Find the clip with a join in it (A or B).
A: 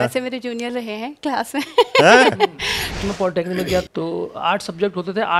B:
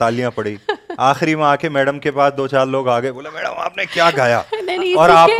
A